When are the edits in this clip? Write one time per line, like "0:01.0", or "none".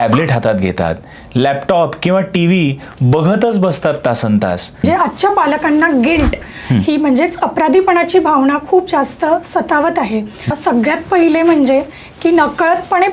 0:04.8
0:10.6